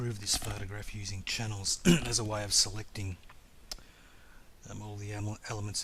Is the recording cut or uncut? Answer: uncut